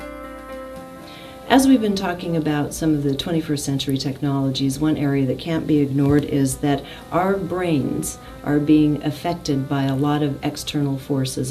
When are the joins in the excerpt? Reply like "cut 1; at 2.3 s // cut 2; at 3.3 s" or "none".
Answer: cut 1; at 0.9 s // cut 2; at 10.0 s